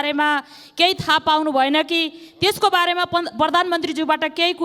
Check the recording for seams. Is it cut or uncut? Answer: uncut